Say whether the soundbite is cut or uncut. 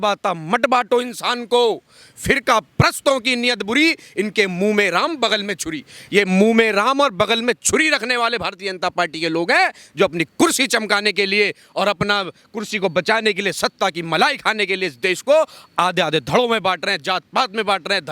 uncut